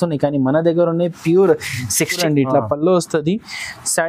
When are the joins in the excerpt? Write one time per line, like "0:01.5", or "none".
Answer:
0:02.2

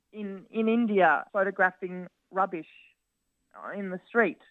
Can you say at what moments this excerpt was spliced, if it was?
0:01.3

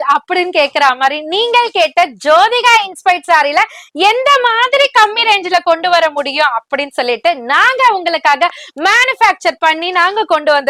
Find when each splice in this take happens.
none

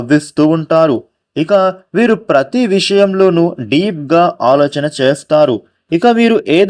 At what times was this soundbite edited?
none

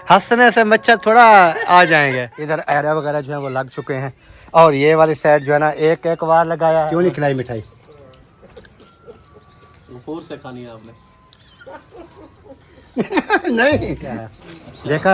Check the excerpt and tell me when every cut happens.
0:02.4
0:06.9
0:14.2

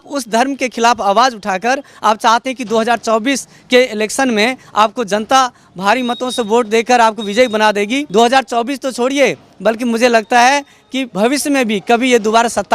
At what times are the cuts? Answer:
0:08.1

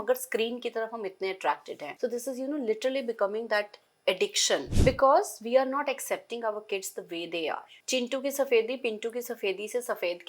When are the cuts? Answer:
0:01.8
0:04.7
0:07.7

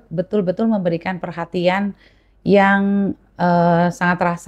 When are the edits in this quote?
none

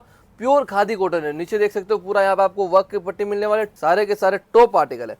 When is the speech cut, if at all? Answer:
0:03.7

